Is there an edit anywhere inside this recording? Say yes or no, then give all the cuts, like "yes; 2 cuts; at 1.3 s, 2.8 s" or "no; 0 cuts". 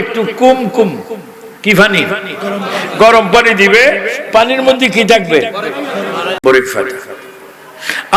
yes; 1 cut; at 6.3 s